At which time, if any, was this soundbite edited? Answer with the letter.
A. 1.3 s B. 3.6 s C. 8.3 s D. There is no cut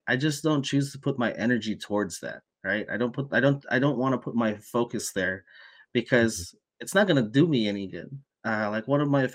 C